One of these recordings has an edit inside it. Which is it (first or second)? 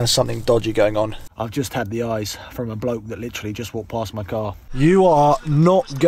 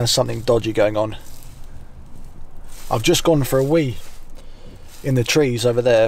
first